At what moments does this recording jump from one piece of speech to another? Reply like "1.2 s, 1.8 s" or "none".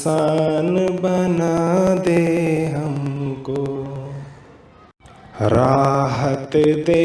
2.4 s